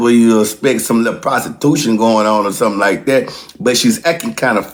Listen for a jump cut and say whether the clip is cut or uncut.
uncut